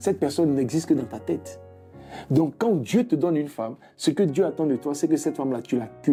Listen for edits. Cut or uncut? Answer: uncut